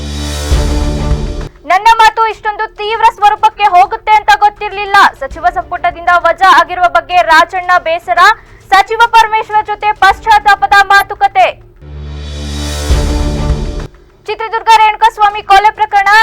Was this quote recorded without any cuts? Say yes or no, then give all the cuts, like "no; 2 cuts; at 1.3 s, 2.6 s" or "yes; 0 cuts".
no; 1 cut; at 1.5 s